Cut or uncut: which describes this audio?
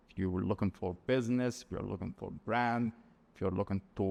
uncut